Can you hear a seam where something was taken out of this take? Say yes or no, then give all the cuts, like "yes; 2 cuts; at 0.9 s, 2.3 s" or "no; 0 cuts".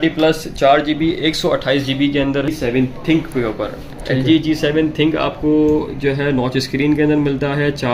yes; 1 cut; at 2.5 s